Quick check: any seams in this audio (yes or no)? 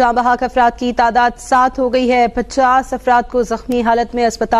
no